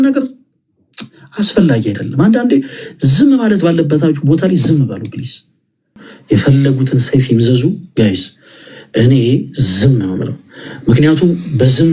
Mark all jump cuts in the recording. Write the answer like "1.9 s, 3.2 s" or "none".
6.1 s